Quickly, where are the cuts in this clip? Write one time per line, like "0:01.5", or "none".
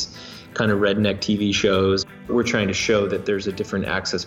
0:02.3